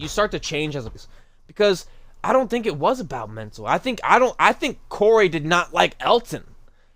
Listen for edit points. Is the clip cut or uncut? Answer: cut